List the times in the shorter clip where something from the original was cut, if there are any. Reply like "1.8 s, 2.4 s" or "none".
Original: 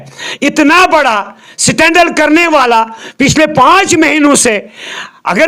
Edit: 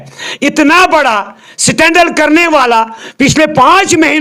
none